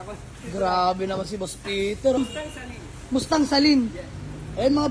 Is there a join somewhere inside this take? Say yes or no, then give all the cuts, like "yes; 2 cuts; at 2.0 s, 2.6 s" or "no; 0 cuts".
yes; 1 cut; at 2.2 s